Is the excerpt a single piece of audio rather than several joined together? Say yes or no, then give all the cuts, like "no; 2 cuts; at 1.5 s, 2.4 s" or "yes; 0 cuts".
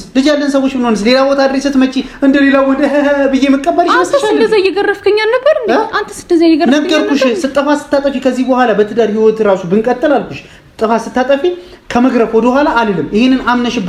yes; 0 cuts